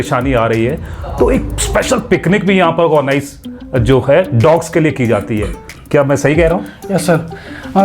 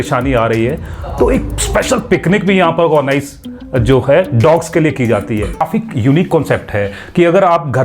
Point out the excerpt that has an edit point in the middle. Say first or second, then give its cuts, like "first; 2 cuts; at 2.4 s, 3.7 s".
second; 1 cut; at 5.7 s